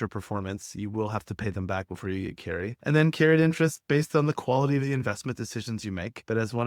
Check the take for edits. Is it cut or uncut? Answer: uncut